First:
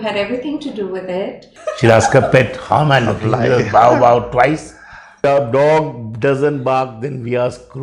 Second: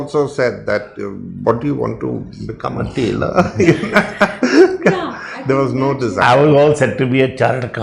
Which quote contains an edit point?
first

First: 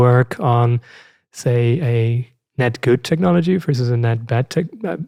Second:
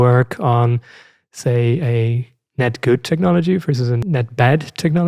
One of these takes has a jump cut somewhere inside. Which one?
second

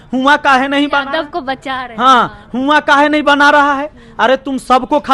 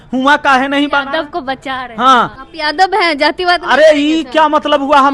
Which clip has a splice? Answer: second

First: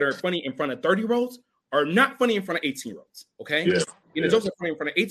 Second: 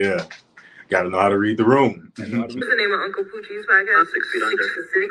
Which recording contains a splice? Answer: second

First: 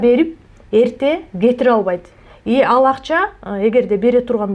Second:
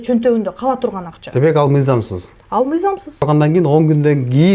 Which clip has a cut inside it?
second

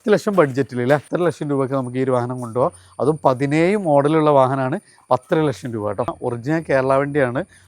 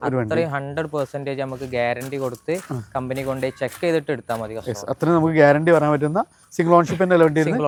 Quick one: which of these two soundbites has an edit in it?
first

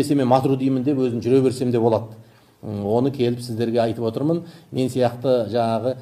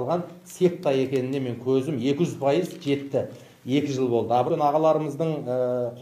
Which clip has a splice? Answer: second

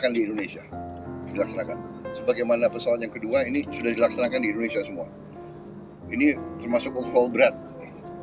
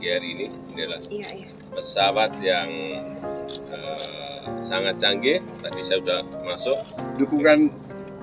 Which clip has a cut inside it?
second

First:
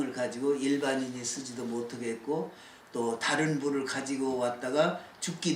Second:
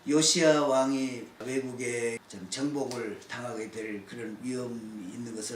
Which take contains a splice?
second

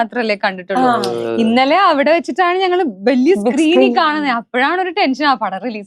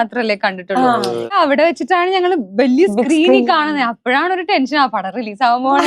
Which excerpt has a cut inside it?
second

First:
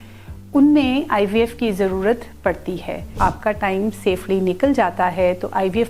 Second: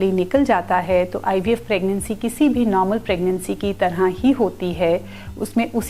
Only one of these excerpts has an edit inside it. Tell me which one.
first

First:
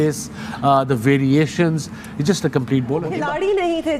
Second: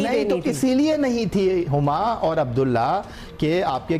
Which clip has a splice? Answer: first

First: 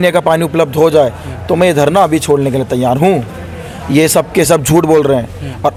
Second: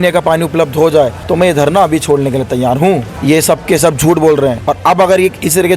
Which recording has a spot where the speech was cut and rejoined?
second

